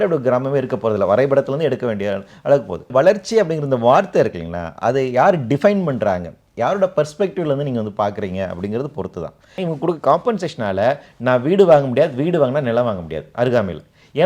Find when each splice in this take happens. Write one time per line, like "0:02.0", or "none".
0:02.9
0:09.7